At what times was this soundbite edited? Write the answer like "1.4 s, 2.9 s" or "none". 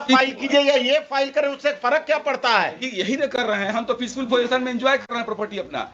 none